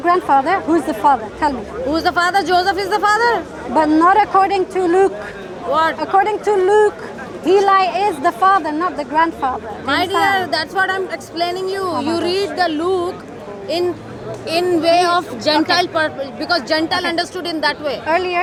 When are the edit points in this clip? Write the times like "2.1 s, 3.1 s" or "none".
none